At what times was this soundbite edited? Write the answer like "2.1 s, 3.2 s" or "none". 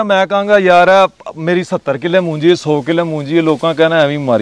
none